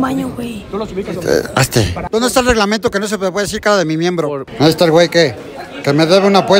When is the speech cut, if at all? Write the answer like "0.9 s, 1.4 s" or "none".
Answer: 2.1 s, 4.5 s